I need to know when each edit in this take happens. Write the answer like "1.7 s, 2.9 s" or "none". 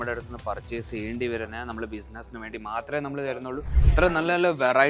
3.7 s